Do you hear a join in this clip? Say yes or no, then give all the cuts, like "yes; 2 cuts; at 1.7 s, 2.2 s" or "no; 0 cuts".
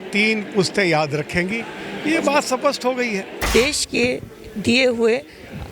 yes; 1 cut; at 3.5 s